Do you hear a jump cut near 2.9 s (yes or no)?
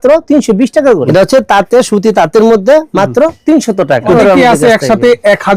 no